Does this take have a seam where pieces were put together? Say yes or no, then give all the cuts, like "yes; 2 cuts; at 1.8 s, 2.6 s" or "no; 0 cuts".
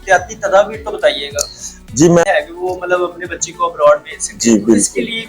yes; 1 cut; at 2.2 s